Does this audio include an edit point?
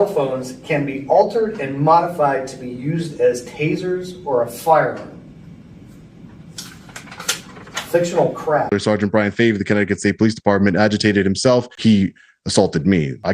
yes; 2 cuts; at 8.7 s, 11.7 s

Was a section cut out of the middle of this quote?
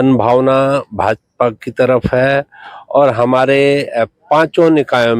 no; 0 cuts

